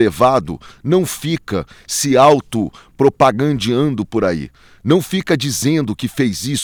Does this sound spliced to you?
no; 0 cuts

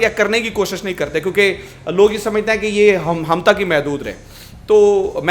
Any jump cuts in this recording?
no; 0 cuts

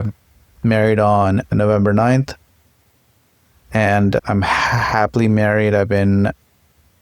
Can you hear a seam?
yes; 2 cuts; at 1.5 s, 4.2 s

